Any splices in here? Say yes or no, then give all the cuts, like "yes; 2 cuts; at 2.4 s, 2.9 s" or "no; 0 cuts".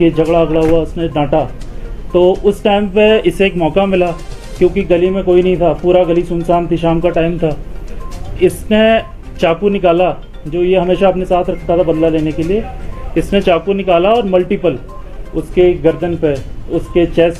no; 0 cuts